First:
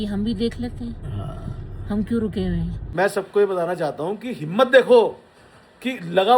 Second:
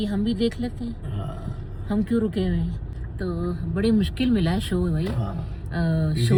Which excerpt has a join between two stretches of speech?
first; 1 cut; at 2.8 s

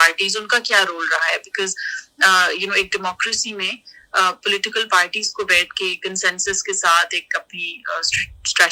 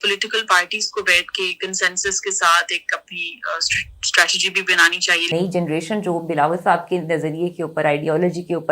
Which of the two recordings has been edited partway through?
second; 1 cut; at 5.3 s

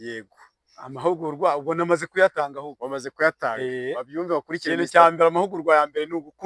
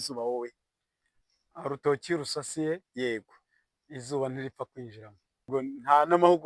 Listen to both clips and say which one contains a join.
second; 1 cut; at 5.4 s

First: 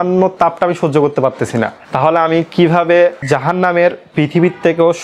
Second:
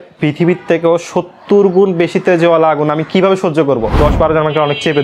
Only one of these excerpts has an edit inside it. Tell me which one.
second; 1 cut; at 3.9 s

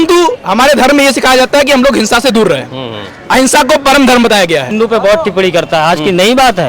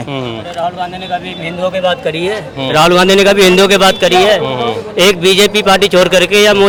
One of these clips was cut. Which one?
first; 1 cut; at 4.7 s

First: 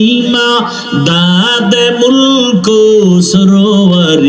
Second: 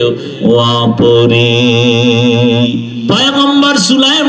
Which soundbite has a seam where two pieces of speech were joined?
second; 1 cut; at 2.9 s

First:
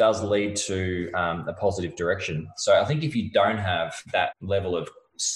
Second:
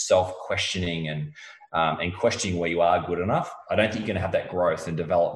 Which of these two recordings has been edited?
first; 2 cuts; at 2.5 s, 4.4 s

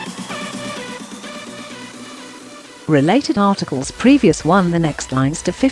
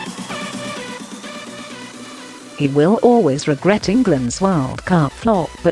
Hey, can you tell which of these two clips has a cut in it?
second; 1 cut; at 2.5 s

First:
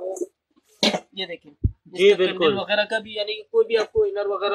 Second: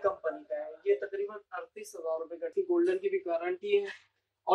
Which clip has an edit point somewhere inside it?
second; 1 cut; at 2.5 s

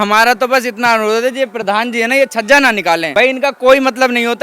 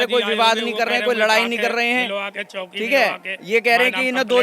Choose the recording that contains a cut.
first; 1 cut; at 3.1 s

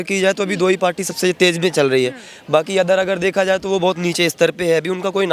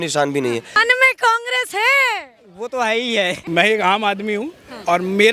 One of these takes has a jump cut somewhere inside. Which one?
second; 2 cuts; at 0.8 s, 3.4 s

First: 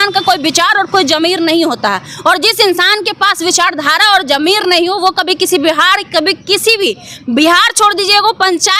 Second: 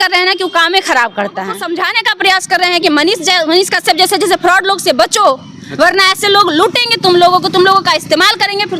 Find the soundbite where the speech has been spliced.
second; 1 cut; at 1.6 s

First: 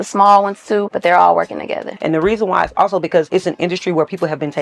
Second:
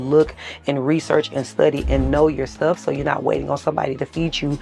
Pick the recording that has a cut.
first; 3 cuts; at 0.9 s, 1.9 s, 3.3 s

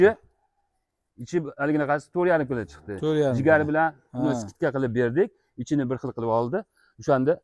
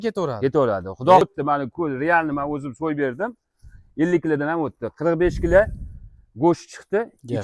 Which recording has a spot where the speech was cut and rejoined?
second; 1 cut; at 1.2 s

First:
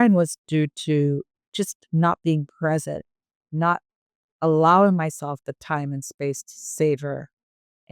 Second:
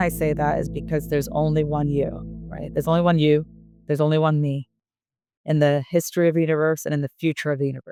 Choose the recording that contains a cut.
first; 1 cut; at 1.4 s

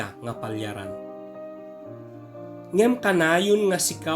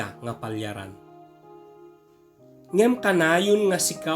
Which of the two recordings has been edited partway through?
first; 2 cuts; at 0.8 s, 2.6 s

